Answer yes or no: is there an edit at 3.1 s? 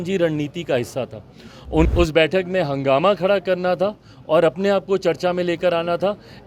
no